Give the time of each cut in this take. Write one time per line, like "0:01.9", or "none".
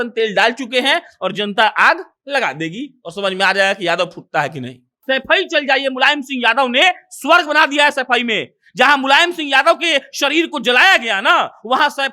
0:05.0